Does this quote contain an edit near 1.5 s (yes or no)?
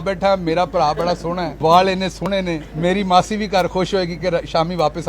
yes